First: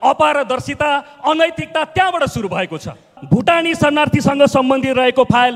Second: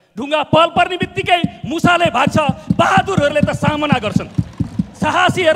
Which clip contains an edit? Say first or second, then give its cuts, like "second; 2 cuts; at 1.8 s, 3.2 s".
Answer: first; 1 cut; at 3.1 s